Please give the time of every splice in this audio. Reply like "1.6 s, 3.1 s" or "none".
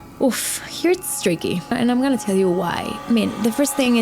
1.7 s, 2.9 s